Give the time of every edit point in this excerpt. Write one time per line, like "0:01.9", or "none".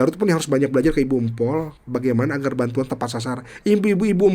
none